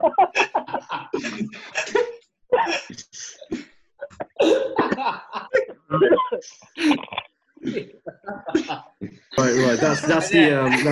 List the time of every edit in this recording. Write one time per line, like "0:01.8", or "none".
0:09.4